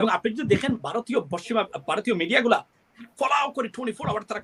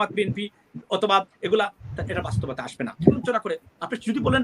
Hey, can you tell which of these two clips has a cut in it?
second; 1 cut; at 3.2 s

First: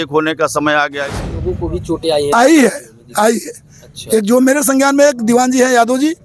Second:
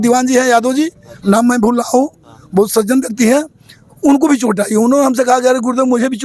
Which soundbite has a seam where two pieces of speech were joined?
first; 1 cut; at 1.4 s

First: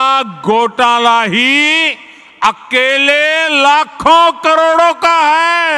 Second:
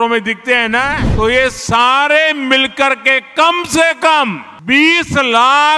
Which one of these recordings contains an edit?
second; 2 cuts; at 1.0 s, 4.5 s

